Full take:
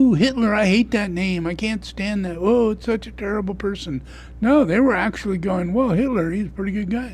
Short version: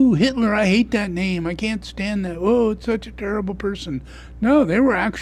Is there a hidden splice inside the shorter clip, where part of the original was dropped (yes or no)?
no